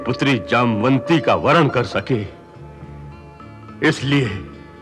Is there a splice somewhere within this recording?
no; 0 cuts

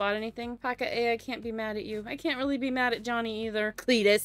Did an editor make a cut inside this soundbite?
no; 0 cuts

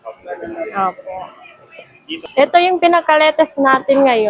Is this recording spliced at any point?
yes; 1 cut; at 2.2 s

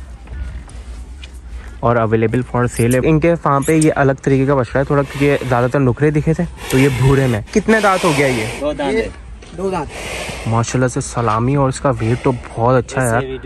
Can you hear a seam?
yes; 2 cuts; at 3.0 s, 7.5 s

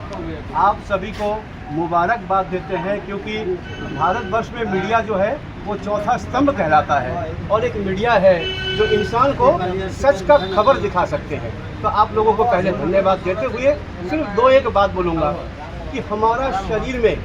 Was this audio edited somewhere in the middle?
no; 0 cuts

